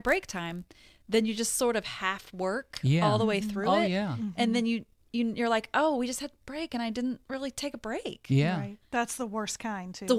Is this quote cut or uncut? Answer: cut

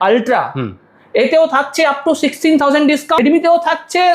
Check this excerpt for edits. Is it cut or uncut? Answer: cut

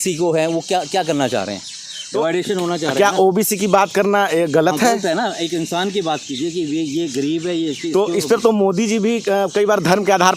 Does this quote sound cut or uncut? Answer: uncut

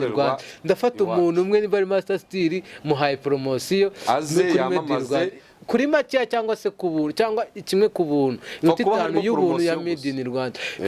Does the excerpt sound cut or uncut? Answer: uncut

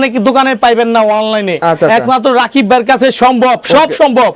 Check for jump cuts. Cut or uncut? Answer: uncut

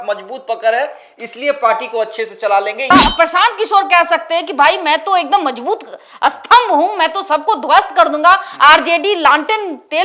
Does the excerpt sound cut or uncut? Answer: cut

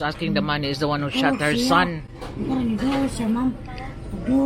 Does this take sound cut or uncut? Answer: uncut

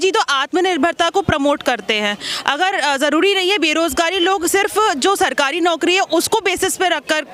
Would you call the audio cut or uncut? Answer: uncut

